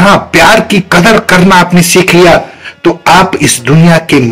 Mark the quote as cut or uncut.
uncut